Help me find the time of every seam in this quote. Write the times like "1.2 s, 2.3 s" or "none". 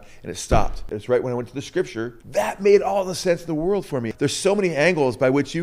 0.9 s, 2.2 s, 4.1 s